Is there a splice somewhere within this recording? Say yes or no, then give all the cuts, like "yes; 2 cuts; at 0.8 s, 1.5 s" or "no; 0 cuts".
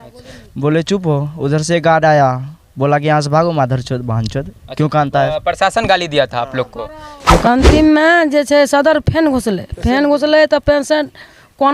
yes; 1 cut; at 7.4 s